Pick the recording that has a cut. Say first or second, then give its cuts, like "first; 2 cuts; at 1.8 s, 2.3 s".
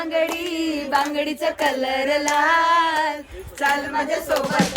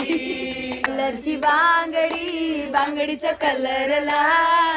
second; 1 cut; at 0.9 s